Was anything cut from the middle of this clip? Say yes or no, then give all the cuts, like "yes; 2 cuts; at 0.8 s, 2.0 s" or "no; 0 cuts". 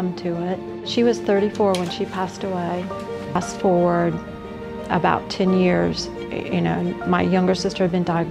no; 0 cuts